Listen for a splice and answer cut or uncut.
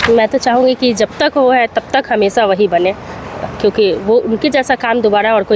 uncut